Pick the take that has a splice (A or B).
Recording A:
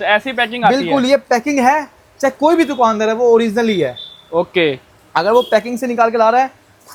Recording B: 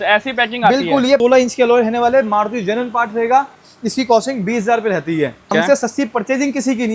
B